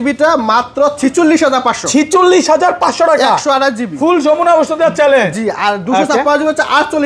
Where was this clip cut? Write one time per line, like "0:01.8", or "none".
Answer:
none